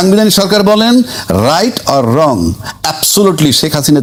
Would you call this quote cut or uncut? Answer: uncut